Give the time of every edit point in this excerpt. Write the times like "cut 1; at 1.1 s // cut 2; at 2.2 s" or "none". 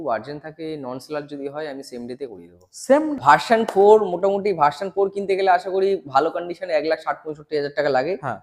cut 1; at 3.1 s